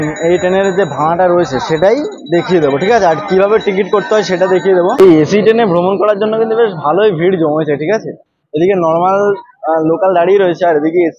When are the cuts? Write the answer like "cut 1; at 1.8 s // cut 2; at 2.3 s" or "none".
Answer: cut 1; at 4.9 s